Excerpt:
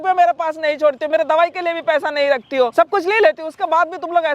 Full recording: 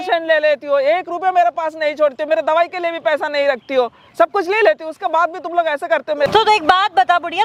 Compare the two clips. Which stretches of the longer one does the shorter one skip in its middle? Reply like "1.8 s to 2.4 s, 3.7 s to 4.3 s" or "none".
3.9 s to 4.1 s